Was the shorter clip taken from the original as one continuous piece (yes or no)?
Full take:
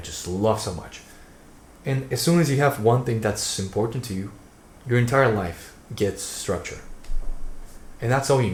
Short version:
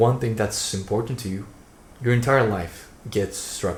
yes